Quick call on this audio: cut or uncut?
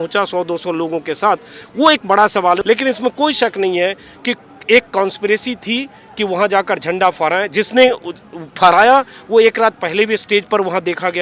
cut